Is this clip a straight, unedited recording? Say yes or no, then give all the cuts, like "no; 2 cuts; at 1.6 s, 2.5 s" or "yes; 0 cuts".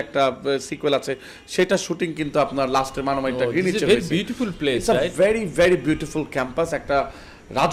yes; 0 cuts